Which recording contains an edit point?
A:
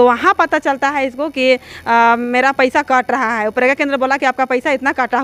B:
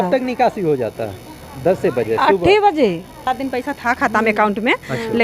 B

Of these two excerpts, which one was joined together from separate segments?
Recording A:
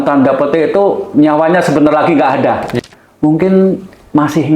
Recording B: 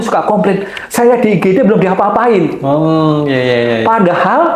A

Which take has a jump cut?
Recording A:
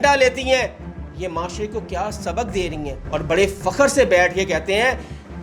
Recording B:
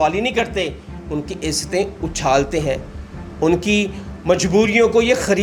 A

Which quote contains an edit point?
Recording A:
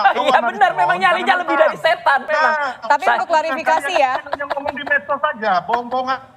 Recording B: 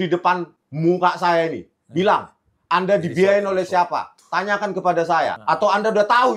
A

